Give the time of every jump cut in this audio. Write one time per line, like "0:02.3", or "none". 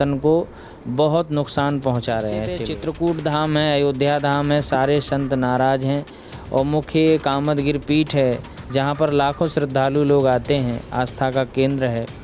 0:02.7

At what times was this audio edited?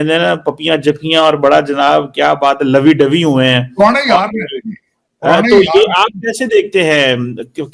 none

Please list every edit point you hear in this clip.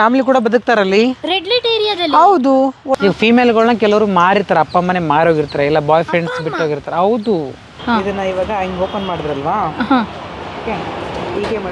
0:02.9
0:07.7

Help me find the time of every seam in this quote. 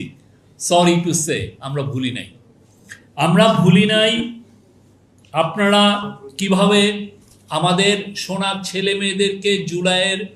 none

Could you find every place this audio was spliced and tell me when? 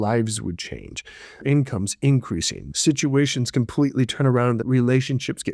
0:01.4
0:02.6
0:04.6

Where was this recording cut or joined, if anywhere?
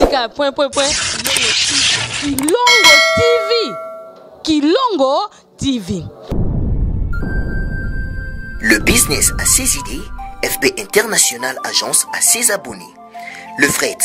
0:06.3

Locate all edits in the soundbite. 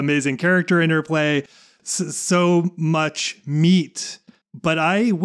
none

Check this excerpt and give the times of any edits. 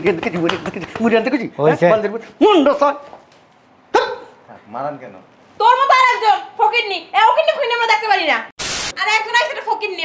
0:08.9

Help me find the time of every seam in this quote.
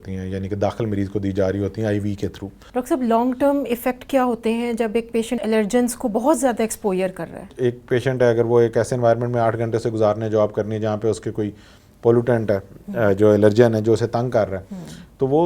0:02.6

